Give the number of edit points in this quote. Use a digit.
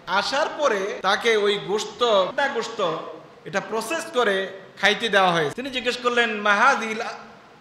3